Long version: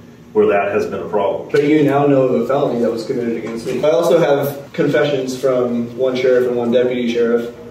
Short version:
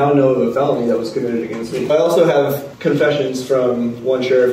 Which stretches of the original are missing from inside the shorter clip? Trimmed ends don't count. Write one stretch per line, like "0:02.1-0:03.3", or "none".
none